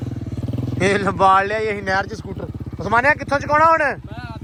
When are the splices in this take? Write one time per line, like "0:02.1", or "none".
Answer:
none